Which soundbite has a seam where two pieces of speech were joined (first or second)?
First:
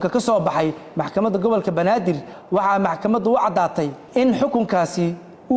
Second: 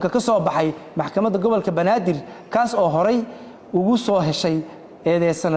first